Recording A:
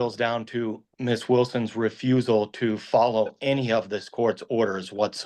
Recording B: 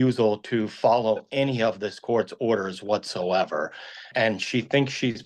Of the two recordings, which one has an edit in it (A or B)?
B